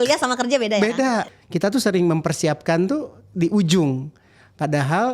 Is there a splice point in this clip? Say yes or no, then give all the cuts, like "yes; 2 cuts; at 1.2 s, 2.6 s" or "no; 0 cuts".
yes; 1 cut; at 1.3 s